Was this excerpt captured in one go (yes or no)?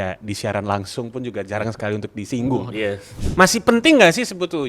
no